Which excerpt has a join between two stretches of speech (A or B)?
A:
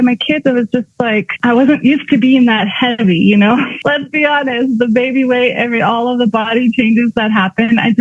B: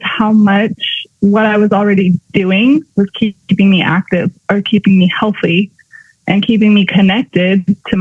A